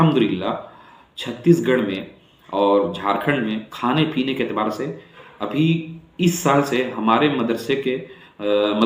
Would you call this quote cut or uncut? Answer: uncut